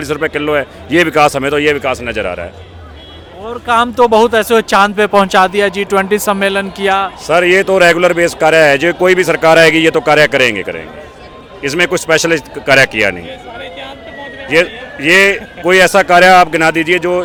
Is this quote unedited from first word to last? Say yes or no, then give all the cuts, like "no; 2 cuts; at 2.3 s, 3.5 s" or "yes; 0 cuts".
yes; 0 cuts